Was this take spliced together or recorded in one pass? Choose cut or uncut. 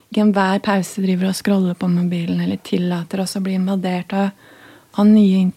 uncut